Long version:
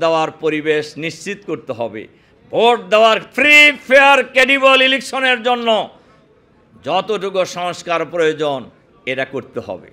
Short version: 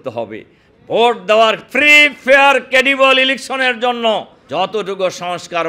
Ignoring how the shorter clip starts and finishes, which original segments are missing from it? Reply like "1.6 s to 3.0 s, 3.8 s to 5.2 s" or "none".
6.0 s to 6.7 s